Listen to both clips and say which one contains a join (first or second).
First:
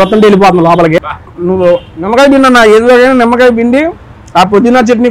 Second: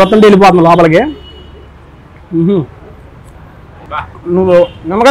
first